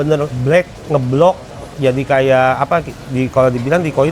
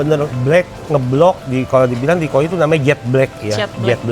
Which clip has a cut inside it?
second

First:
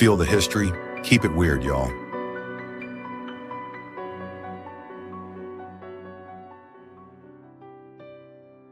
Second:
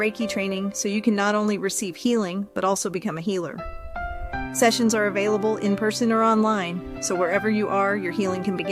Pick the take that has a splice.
first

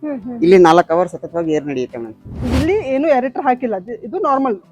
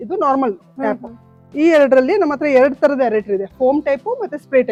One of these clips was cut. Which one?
first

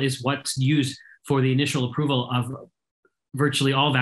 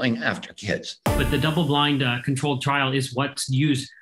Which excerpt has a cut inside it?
second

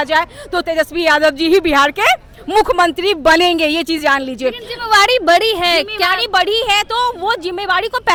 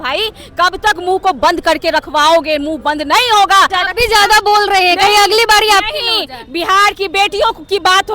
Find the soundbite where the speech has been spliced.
second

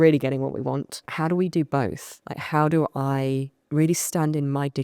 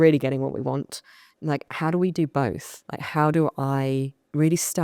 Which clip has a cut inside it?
first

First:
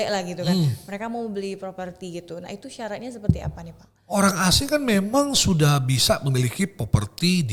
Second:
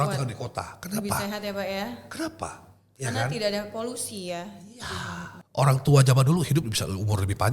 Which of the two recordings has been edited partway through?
second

